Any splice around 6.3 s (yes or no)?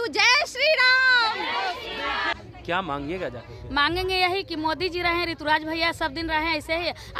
no